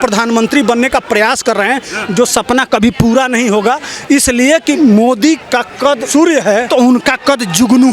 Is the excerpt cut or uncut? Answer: cut